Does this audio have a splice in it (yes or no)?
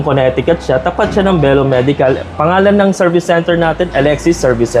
no